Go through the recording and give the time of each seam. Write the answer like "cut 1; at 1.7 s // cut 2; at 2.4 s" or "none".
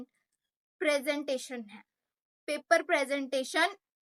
none